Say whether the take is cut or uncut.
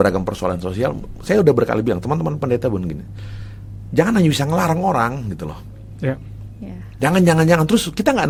uncut